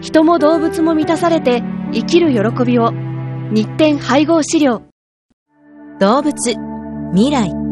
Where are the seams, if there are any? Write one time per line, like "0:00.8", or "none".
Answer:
0:05.2